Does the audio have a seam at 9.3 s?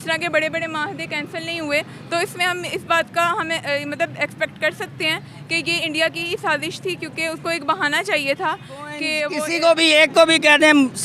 yes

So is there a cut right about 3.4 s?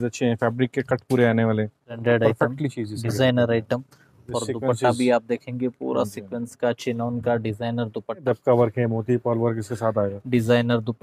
no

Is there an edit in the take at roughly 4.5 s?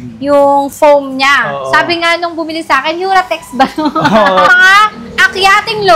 yes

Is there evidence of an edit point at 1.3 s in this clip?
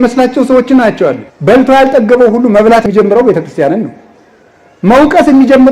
yes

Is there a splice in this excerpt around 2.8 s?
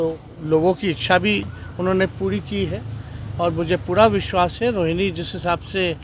no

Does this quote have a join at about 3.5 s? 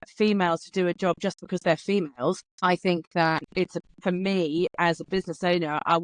yes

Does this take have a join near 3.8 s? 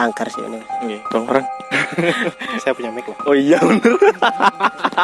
no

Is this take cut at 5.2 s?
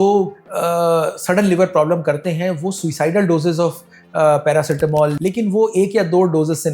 yes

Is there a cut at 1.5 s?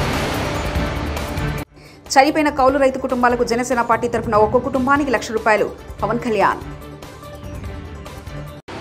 yes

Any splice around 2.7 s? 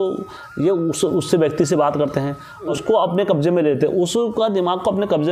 yes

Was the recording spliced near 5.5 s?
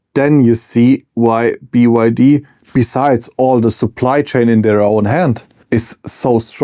yes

